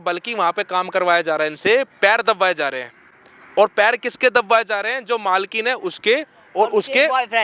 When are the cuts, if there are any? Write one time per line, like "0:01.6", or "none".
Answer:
none